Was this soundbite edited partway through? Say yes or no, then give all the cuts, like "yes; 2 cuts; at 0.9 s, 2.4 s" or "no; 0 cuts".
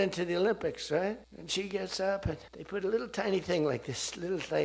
yes; 2 cuts; at 1.3 s, 2.5 s